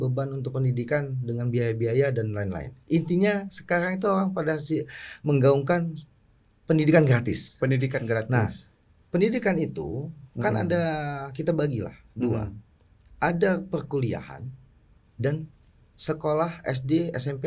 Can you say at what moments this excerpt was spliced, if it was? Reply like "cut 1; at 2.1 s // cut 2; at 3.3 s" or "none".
none